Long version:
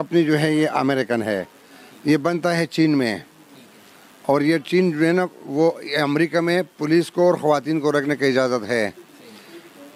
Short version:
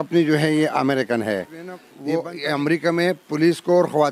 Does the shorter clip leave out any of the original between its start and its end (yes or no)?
yes